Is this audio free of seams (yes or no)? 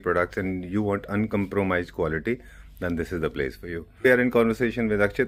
yes